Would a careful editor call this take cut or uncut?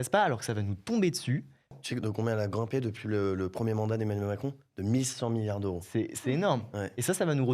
cut